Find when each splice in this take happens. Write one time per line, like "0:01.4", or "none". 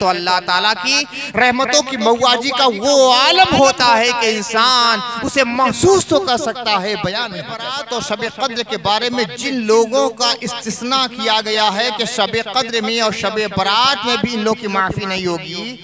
0:07.7